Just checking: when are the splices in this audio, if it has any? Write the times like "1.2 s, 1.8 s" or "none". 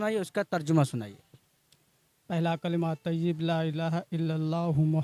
none